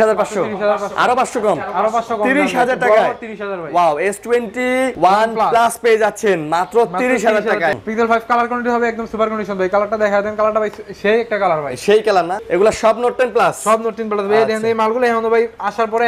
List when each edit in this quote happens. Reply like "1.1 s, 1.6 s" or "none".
4.9 s, 7.7 s, 12.4 s